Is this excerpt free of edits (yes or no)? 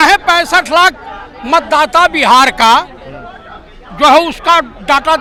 yes